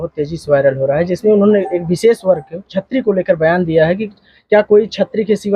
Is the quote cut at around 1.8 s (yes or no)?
no